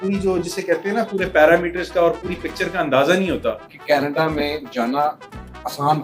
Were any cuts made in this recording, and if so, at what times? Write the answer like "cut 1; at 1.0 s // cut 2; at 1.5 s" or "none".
cut 1; at 3.7 s